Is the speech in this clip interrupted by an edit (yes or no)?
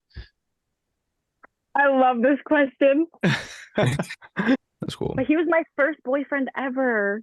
yes